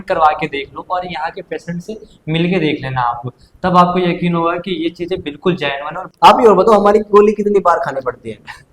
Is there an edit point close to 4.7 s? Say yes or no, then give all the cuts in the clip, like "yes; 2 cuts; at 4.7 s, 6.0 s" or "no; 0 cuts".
no; 1 cut; at 6.1 s